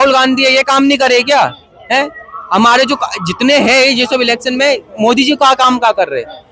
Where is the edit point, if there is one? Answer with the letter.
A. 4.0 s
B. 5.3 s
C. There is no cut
C